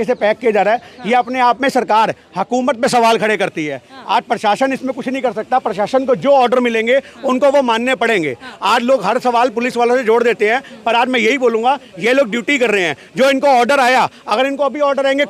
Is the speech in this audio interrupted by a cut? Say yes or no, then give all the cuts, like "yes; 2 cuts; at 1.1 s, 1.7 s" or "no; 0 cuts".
no; 0 cuts